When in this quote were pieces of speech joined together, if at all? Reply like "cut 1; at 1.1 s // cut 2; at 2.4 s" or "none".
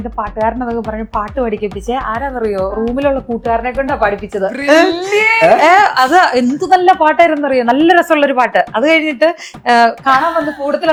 none